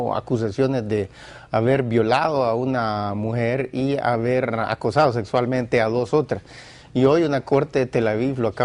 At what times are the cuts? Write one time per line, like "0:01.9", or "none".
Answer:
0:01.4